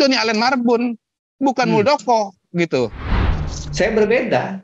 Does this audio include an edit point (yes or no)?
yes